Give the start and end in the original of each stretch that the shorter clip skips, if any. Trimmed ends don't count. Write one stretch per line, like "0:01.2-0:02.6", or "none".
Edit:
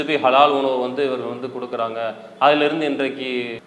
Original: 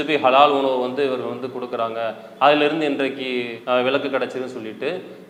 none